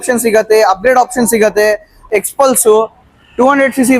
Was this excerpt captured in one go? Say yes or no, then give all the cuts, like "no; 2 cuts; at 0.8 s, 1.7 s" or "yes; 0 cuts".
no; 1 cut; at 2.1 s